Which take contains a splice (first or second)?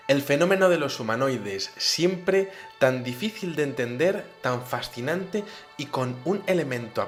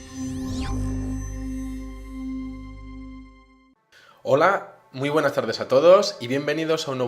second